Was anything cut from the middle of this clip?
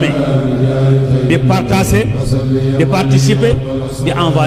no; 0 cuts

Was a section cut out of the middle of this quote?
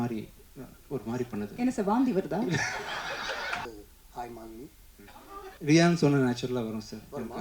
yes; 2 cuts; at 3.7 s, 5.5 s

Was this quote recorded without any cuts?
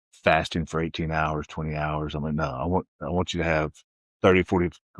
yes; 0 cuts

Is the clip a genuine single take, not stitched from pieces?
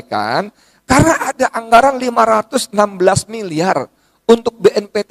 yes; 0 cuts

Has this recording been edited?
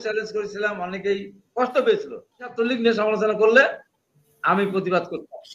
yes; 1 cut; at 2.6 s

